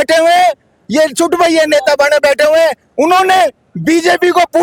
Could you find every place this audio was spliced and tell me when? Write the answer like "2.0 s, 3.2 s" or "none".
none

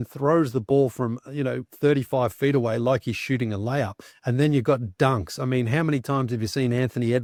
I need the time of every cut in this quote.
none

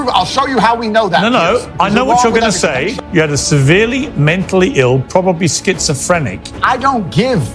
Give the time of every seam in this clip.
2.9 s

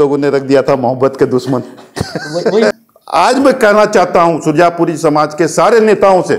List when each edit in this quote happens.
2.7 s

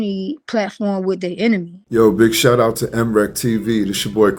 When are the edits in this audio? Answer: 1.8 s

